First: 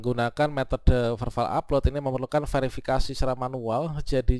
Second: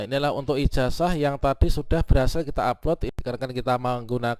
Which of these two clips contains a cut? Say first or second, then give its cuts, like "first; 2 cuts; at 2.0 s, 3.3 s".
second; 1 cut; at 3.1 s